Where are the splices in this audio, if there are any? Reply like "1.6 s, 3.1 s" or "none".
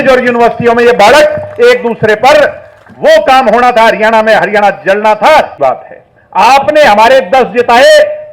5.5 s